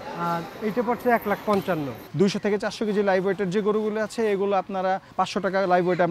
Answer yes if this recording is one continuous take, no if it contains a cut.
no